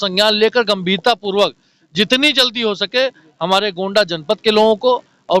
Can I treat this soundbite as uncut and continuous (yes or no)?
yes